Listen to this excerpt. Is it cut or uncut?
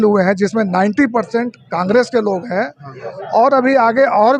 uncut